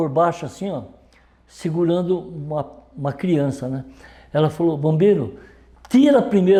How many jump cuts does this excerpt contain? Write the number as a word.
zero